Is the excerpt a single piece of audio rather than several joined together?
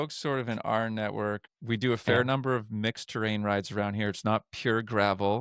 no; 1 cut; at 1.5 s

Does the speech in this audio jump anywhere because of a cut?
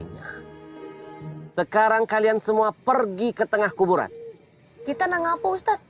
yes; 1 cut; at 1.4 s

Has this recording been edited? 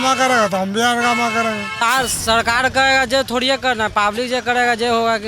yes; 1 cut; at 1.8 s

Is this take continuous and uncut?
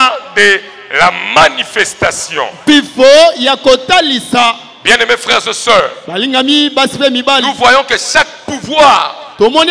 yes; 0 cuts

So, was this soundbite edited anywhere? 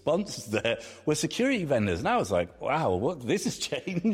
no; 0 cuts

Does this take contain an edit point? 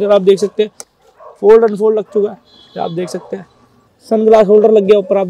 yes; 1 cut; at 3.9 s

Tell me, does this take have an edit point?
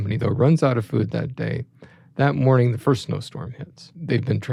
no; 0 cuts

